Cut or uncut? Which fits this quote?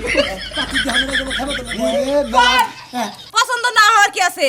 cut